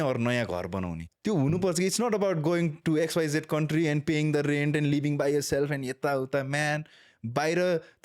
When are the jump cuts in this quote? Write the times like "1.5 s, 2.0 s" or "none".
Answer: 1.1 s